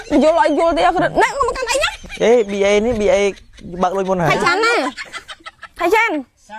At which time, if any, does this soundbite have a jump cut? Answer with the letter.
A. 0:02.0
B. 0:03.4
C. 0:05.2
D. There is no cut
A